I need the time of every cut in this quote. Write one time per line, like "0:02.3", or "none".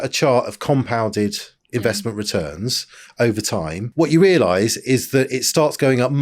0:03.8

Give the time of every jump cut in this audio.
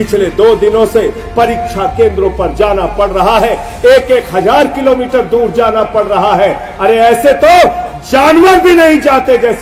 none

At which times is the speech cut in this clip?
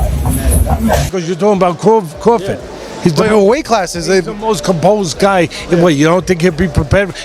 0:00.9

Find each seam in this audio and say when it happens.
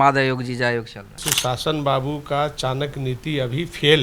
0:01.2

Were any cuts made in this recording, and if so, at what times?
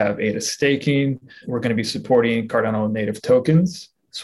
0:01.4

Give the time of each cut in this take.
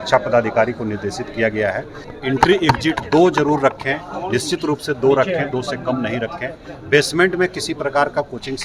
0:02.1

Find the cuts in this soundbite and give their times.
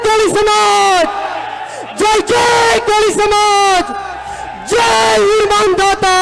none

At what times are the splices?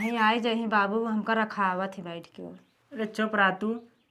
none

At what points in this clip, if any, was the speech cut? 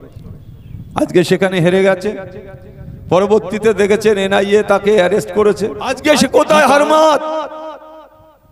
0:05.9

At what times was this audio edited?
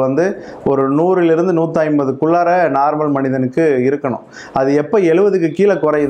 none

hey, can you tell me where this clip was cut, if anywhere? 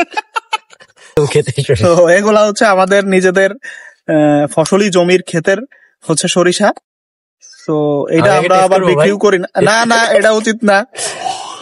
0:01.2

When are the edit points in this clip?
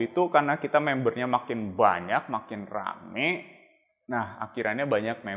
none

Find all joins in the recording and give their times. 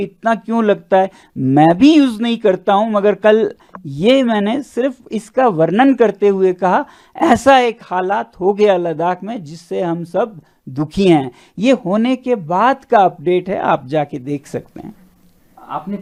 none

